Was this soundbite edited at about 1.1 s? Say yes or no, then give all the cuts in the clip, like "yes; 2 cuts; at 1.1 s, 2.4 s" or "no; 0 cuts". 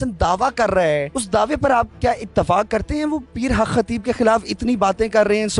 yes; 1 cut; at 1.1 s